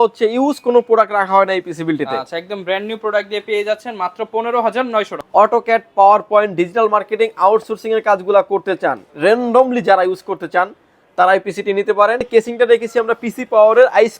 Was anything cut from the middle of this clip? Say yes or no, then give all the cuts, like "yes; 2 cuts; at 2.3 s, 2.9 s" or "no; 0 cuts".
yes; 2 cuts; at 5.1 s, 12.3 s